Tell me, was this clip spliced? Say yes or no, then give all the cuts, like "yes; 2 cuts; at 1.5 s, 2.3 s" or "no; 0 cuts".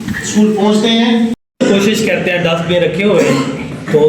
yes; 1 cut; at 1.4 s